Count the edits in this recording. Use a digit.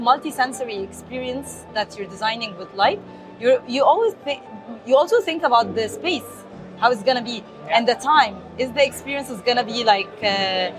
0